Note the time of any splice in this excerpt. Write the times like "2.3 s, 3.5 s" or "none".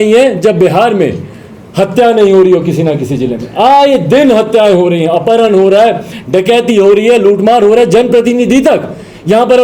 none